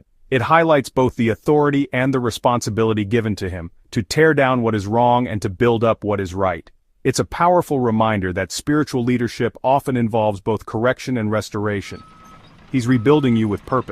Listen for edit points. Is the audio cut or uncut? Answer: uncut